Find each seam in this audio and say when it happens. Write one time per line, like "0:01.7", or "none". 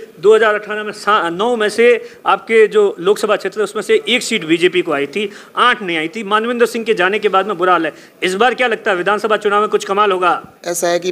none